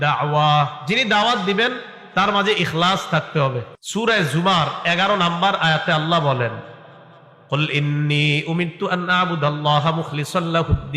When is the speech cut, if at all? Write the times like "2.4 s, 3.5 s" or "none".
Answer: 3.7 s